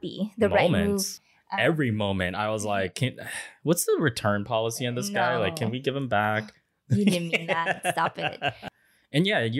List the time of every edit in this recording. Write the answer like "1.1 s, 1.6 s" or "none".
1.3 s, 8.7 s